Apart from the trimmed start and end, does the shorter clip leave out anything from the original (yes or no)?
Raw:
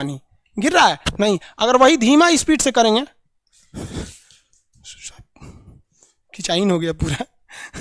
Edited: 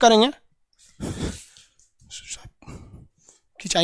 no